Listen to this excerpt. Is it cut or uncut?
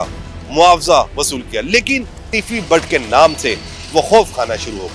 cut